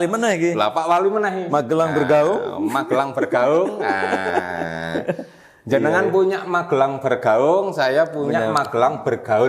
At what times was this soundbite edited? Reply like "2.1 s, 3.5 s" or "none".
none